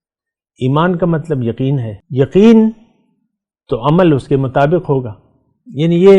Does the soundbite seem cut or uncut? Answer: cut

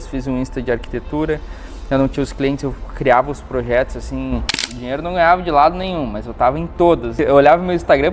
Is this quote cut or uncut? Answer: cut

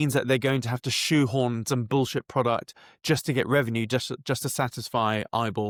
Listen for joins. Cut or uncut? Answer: uncut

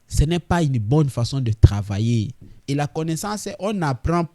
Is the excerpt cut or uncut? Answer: cut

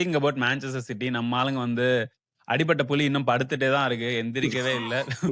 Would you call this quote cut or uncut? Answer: uncut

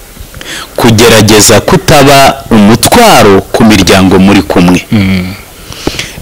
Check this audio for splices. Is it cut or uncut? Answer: uncut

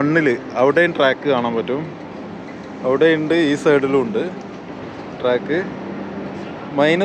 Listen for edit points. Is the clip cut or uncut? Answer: uncut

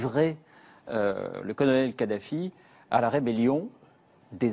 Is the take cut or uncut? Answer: cut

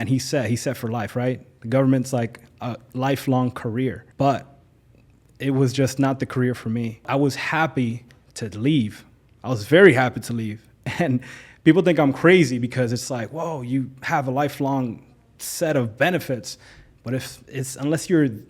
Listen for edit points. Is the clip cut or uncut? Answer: cut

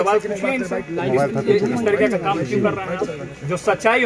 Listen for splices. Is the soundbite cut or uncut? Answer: uncut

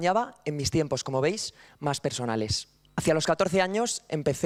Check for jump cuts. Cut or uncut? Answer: uncut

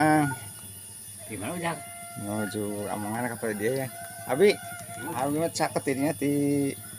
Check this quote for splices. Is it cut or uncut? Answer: uncut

